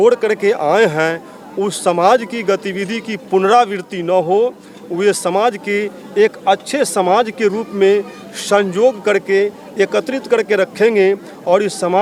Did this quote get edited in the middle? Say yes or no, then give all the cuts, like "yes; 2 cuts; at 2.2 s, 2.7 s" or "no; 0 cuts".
no; 0 cuts